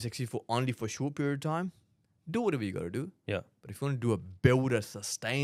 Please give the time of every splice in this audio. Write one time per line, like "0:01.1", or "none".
none